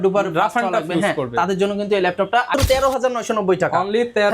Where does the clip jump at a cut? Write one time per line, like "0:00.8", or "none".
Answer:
0:02.5